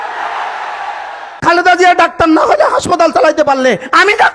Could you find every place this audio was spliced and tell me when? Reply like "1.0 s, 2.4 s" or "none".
1.4 s